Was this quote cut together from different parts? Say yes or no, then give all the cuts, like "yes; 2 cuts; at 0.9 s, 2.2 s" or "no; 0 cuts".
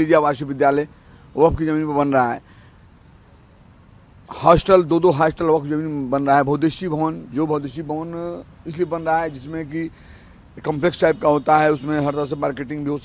no; 0 cuts